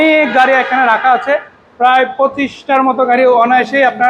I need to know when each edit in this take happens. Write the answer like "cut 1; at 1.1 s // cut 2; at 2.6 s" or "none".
none